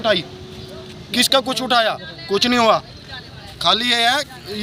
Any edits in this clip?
no; 0 cuts

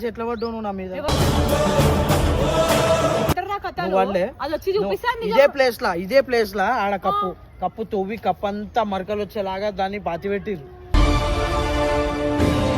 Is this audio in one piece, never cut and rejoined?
no; 1 cut; at 3.3 s

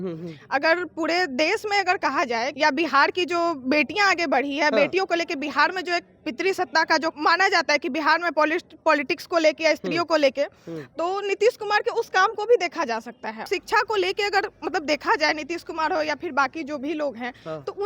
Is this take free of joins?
no; 3 cuts; at 2.5 s, 7.1 s, 13.5 s

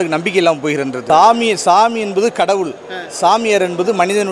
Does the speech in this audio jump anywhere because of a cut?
yes; 1 cut; at 1.0 s

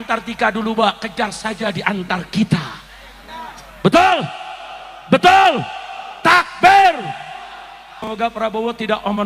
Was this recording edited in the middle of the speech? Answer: yes; 1 cut; at 7.9 s

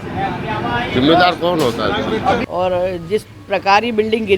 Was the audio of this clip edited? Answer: yes; 1 cut; at 2.4 s

